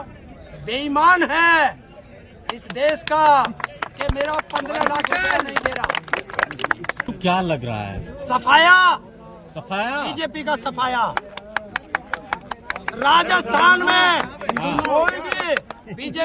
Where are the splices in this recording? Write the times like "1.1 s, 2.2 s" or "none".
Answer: none